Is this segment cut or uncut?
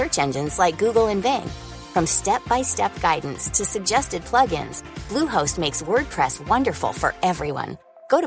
uncut